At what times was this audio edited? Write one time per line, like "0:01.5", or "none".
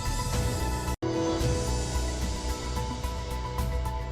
0:03.2